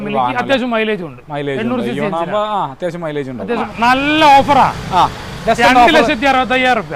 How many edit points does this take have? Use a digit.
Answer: 1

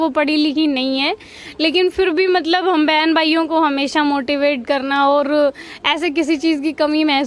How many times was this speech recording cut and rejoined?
0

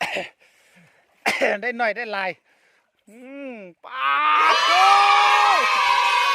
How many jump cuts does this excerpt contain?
1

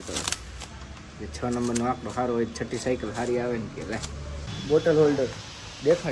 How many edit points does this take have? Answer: 1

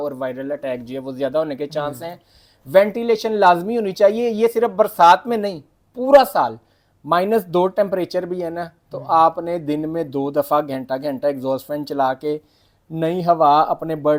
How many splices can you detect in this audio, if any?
0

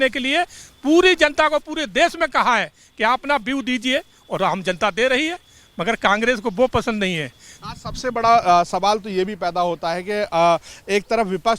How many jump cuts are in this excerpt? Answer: 0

